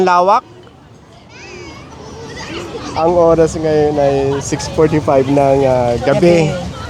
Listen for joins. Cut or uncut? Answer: cut